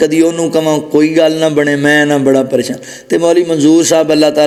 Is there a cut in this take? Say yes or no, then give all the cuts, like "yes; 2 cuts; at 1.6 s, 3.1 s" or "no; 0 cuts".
no; 0 cuts